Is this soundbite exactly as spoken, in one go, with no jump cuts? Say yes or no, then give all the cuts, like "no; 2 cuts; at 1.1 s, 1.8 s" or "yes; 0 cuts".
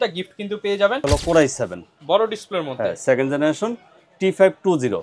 no; 1 cut; at 1.0 s